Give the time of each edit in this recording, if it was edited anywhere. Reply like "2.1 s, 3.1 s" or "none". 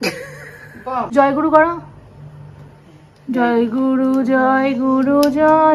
1.1 s